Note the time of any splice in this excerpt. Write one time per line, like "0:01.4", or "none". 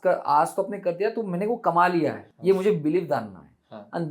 0:02.3